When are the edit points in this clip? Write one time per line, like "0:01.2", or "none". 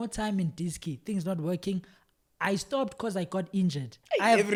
none